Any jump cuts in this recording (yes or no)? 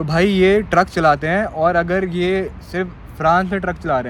no